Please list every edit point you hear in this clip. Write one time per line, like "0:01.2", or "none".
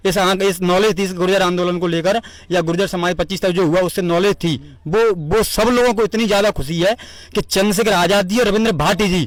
none